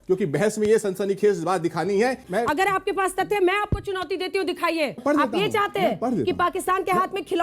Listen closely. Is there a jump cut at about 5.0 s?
yes; 2 cuts; at 2.2 s, 5.0 s

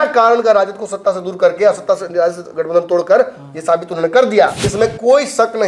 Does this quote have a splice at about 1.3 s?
no; 1 cut; at 4.6 s

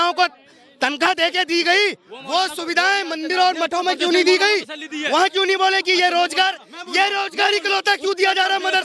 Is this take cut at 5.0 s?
no; 0 cuts

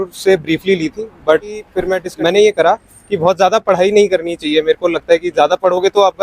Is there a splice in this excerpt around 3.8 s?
no; 1 cut; at 1.8 s

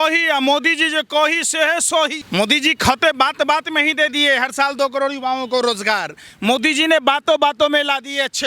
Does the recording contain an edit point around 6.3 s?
no; 1 cut; at 2.2 s

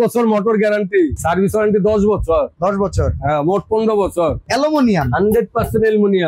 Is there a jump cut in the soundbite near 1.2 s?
yes; 2 cuts; at 1.2 s, 4.4 s

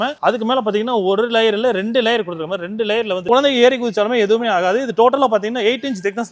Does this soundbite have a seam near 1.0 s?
no; 1 cut; at 3.2 s

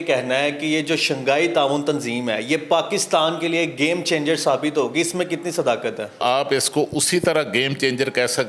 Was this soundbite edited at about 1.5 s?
no; 0 cuts

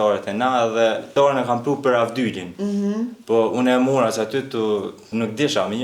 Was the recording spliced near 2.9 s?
no; 2 cuts; at 1.1 s, 5.1 s

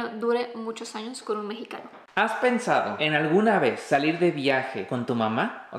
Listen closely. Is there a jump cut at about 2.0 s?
yes; 4 cuts; at 2.0 s, 2.9 s, 3.8 s, 4.8 s

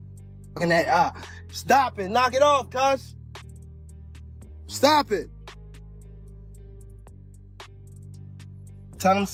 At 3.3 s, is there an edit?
no; 0 cuts

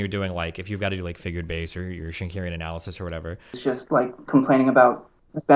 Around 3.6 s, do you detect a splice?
yes; 1 cut; at 3.6 s

